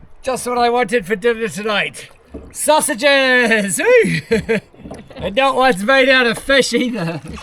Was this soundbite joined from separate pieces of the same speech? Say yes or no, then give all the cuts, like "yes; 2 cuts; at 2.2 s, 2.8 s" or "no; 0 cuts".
no; 0 cuts